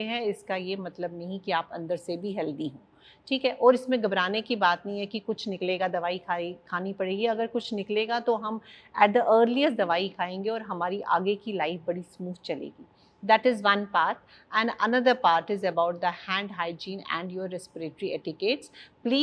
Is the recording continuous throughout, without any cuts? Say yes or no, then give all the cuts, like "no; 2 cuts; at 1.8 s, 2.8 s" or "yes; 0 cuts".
yes; 0 cuts